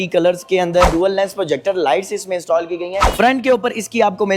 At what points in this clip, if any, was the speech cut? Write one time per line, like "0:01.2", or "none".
0:00.9
0:03.1